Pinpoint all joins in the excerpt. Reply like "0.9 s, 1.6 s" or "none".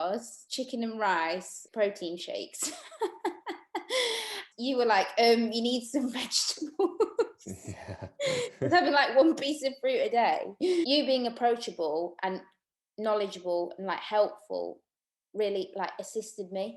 10.9 s